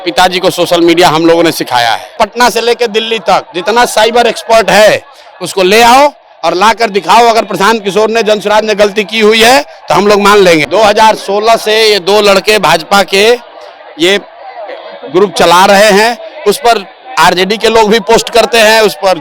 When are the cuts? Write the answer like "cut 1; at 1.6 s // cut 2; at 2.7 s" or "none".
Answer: cut 1; at 2.1 s // cut 2; at 10.6 s